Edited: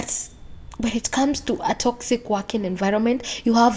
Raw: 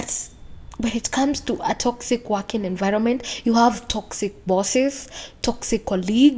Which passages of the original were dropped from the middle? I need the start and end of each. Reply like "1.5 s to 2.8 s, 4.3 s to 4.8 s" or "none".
none